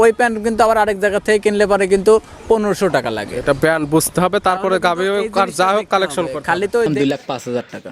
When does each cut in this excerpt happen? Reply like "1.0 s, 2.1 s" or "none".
6.9 s